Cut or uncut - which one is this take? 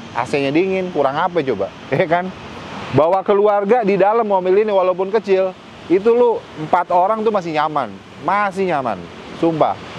uncut